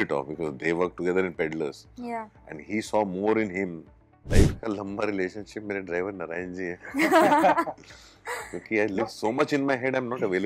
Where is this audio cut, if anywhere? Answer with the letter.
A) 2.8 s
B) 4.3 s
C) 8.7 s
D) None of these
B